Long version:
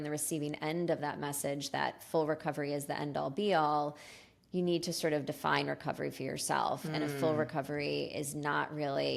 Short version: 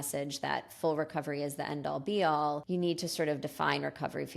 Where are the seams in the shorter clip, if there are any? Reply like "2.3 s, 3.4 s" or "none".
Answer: 2.6 s